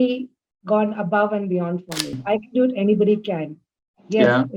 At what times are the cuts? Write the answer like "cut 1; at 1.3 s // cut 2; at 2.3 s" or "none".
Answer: cut 1; at 2.2 s